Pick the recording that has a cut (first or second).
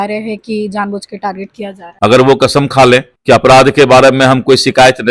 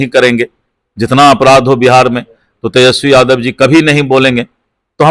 first